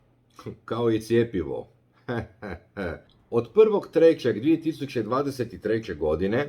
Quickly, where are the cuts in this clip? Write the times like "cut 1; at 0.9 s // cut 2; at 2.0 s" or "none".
cut 1; at 3.1 s